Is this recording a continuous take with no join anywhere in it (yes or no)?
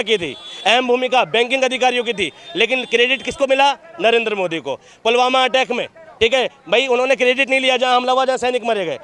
yes